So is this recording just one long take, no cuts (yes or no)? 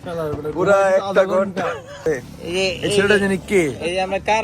no